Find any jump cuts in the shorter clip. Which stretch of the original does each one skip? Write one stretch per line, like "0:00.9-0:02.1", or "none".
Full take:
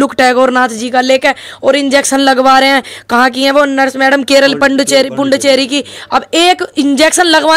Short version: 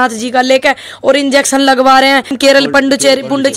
0:02.9-0:04.2